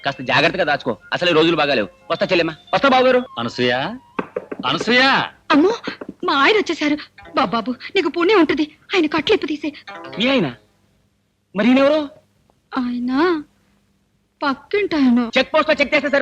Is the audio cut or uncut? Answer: cut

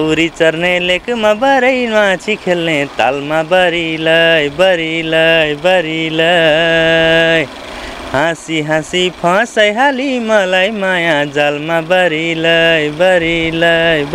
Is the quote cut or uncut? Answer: uncut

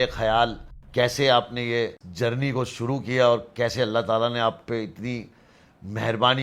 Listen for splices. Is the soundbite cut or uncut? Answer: uncut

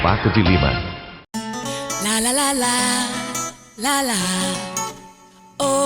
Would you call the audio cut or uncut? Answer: cut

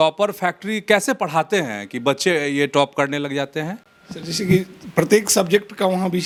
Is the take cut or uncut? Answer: uncut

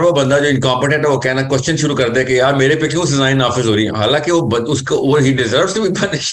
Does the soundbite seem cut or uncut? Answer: uncut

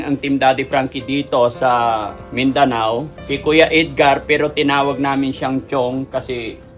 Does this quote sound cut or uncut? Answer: cut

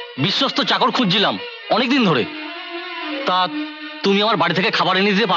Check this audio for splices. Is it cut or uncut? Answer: uncut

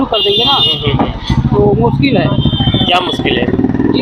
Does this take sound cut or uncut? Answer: uncut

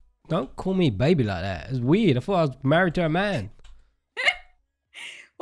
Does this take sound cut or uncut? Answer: uncut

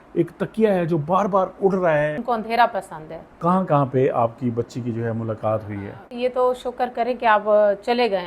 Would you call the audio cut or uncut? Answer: cut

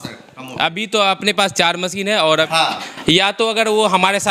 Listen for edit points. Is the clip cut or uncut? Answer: cut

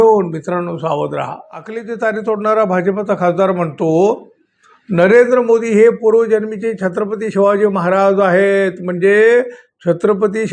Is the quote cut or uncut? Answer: cut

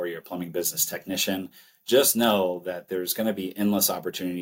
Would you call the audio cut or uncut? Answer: uncut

